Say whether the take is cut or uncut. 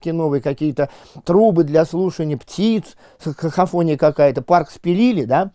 uncut